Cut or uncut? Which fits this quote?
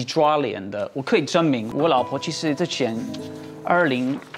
cut